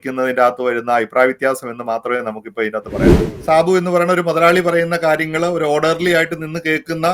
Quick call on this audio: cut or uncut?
cut